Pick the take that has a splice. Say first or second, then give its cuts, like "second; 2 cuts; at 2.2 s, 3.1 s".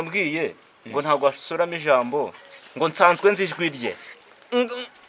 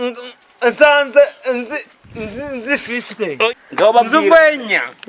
second; 1 cut; at 3.5 s